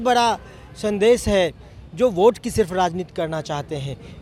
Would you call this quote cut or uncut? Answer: uncut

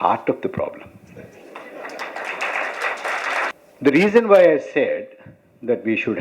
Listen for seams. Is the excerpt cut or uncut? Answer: cut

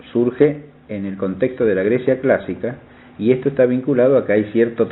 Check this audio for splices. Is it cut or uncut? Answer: uncut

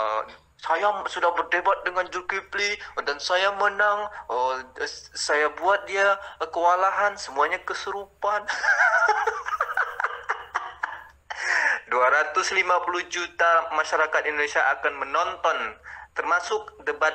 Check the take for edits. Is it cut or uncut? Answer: uncut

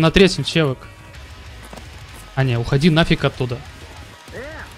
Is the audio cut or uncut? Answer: uncut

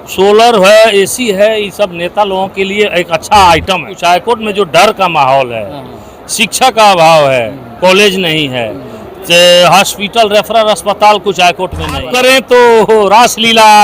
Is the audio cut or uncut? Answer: cut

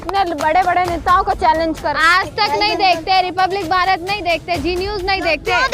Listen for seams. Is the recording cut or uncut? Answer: cut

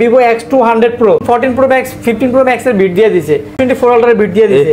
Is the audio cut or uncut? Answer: cut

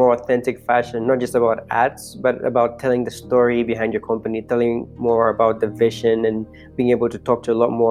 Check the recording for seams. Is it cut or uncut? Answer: uncut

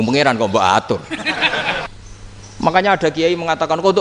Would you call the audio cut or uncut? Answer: cut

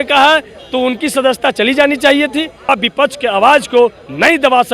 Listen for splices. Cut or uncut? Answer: cut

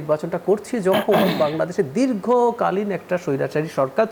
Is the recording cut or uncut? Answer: uncut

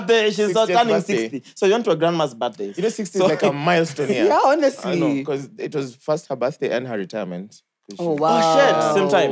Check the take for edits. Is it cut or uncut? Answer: uncut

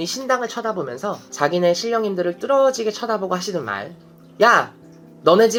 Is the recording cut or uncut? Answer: uncut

